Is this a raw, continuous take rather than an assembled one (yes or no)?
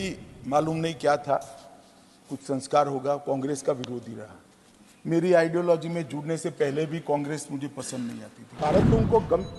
no